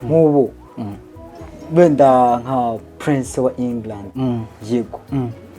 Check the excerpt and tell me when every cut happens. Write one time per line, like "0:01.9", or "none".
0:04.1

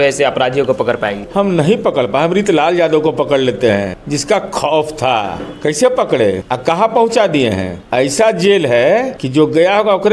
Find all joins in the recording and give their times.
0:01.2
0:04.0
0:05.4
0:06.4
0:07.8
0:09.2

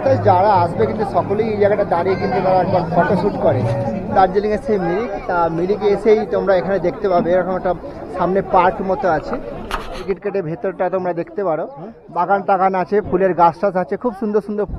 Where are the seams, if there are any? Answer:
0:04.0
0:10.0

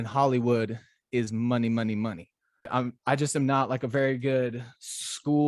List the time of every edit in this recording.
0:02.7

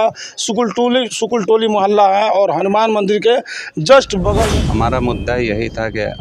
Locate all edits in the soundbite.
0:04.5

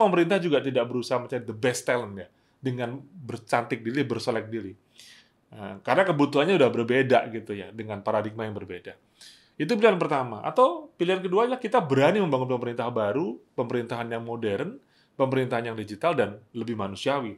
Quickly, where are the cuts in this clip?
none

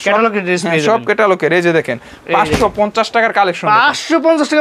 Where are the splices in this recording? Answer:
none

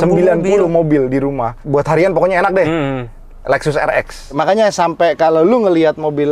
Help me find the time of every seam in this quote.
0:01.6
0:04.3

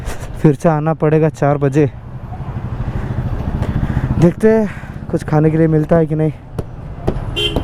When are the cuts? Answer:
none

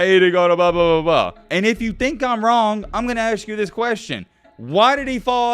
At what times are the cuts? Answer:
0:01.4

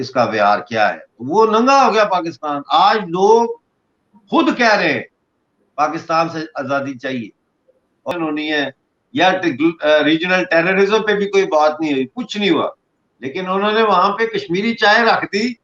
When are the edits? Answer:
0:08.1

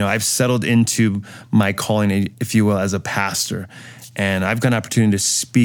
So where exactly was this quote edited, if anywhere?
0:02.3

